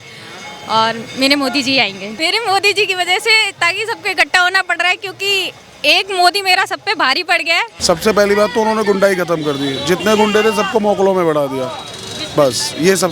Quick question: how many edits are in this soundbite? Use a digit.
2